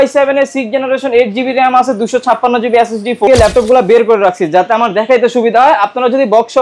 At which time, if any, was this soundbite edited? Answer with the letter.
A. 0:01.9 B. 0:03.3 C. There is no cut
B